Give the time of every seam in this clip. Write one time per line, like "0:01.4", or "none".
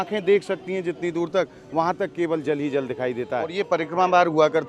0:03.5